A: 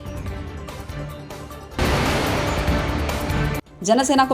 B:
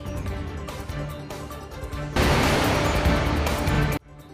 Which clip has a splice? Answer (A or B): A